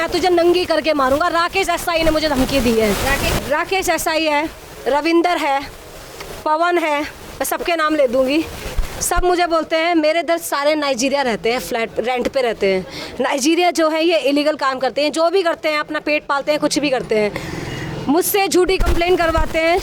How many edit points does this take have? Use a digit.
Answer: 1